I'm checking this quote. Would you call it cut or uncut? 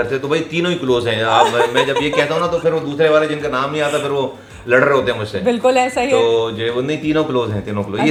uncut